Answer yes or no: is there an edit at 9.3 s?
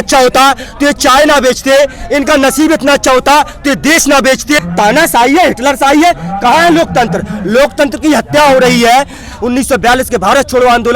yes